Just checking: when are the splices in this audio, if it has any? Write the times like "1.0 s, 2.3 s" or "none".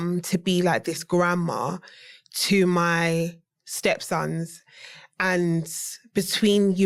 none